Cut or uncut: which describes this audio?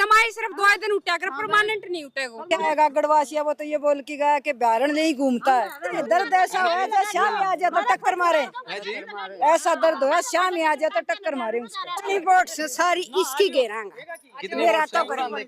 cut